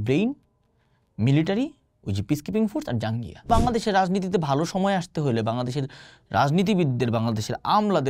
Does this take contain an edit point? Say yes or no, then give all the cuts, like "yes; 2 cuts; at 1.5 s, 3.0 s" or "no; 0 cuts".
yes; 1 cut; at 3.5 s